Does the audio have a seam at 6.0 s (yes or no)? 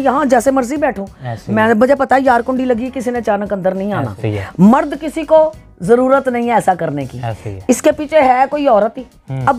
no